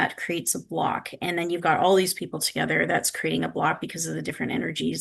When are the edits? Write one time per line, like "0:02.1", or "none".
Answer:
none